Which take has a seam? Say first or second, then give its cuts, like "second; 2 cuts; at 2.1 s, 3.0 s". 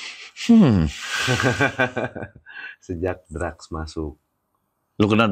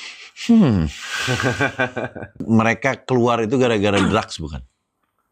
second; 1 cut; at 2.3 s